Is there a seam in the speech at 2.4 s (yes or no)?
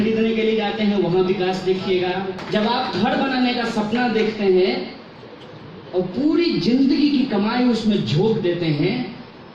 yes